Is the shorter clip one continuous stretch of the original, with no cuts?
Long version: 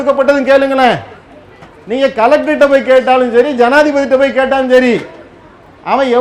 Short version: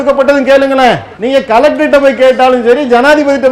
no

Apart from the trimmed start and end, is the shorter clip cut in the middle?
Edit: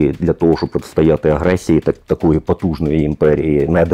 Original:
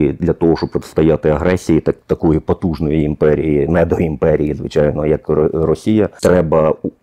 no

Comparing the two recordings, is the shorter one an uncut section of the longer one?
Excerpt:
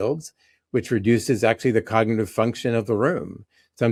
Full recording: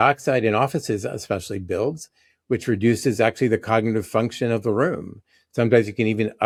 yes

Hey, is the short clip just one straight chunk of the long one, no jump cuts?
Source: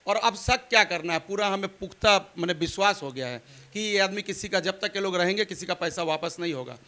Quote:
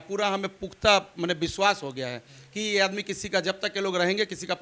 yes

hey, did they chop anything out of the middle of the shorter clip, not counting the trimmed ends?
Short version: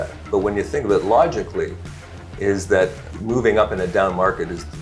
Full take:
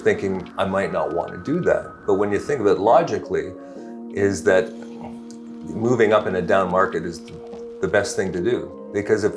yes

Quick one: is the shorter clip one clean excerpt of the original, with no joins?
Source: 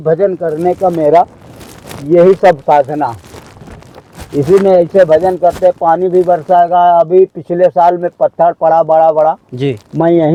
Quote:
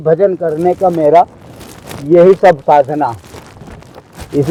yes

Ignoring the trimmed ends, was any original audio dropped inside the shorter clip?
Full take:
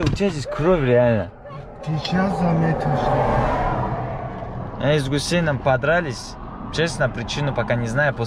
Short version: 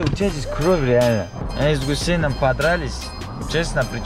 yes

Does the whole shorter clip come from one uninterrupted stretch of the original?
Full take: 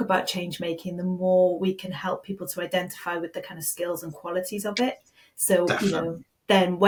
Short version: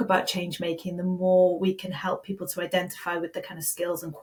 yes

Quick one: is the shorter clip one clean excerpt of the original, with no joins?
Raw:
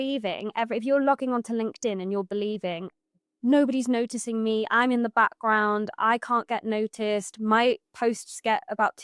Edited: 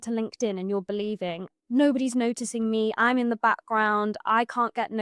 no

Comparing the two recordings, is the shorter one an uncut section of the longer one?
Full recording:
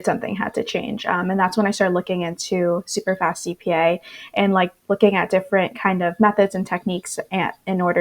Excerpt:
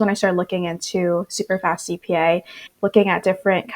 no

